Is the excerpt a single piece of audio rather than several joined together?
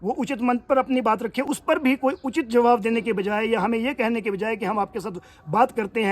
no; 1 cut; at 1.4 s

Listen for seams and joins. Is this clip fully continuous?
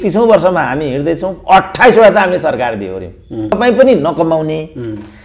no; 1 cut; at 3.6 s

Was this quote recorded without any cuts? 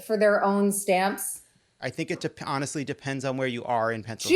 no; 1 cut; at 1.8 s

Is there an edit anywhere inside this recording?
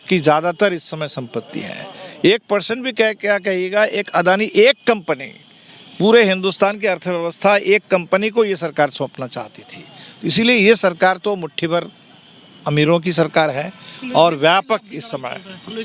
no; 0 cuts

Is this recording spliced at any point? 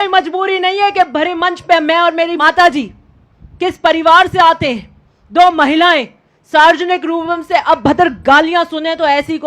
yes; 1 cut; at 2.4 s

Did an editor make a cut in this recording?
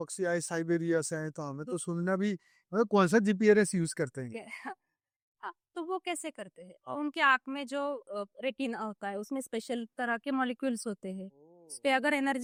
no; 0 cuts

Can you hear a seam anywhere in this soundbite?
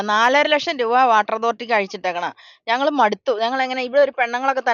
no; 0 cuts

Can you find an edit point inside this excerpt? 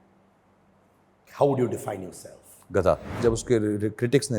yes; 1 cut; at 3.2 s

